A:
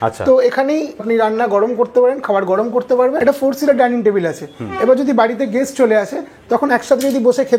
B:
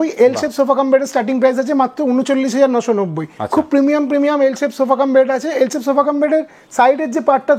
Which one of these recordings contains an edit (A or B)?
A